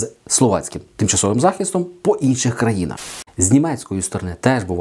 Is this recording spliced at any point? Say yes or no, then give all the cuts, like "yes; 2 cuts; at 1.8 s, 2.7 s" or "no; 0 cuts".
yes; 1 cut; at 3.2 s